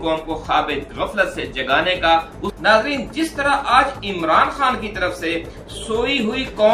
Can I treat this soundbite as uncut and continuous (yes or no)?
no